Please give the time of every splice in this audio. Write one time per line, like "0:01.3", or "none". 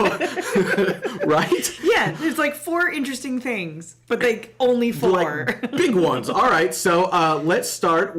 none